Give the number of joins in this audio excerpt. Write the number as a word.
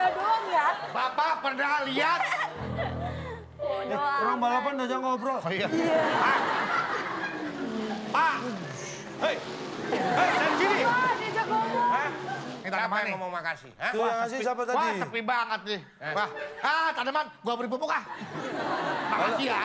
two